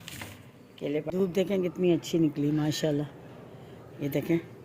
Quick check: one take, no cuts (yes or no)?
no